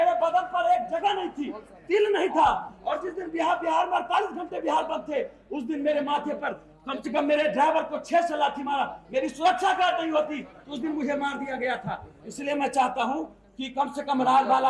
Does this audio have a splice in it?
no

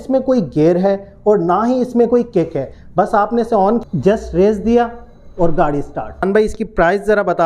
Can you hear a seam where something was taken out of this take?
yes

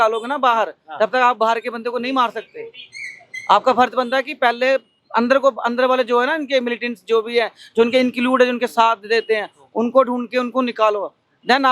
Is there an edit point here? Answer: no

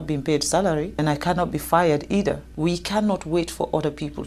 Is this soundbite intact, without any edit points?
no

